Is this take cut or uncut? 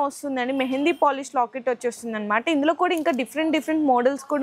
uncut